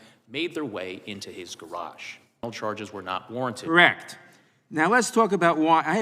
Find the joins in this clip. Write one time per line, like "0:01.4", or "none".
0:02.4